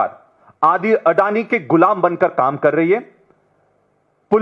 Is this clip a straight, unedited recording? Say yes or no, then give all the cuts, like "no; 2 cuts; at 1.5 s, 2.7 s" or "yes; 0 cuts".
yes; 0 cuts